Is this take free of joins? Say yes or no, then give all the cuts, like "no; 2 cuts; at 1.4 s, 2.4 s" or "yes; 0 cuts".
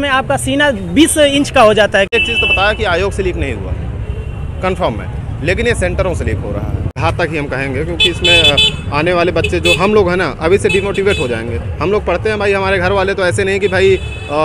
no; 2 cuts; at 2.1 s, 6.8 s